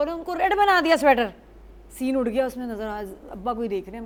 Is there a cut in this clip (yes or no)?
no